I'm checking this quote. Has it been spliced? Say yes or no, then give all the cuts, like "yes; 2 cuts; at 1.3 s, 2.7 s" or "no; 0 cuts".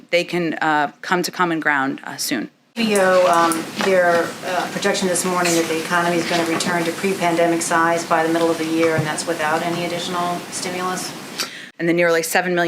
yes; 2 cuts; at 2.7 s, 11.6 s